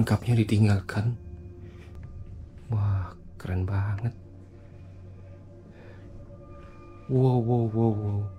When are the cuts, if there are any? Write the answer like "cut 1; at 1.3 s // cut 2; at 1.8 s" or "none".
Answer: cut 1; at 1.9 s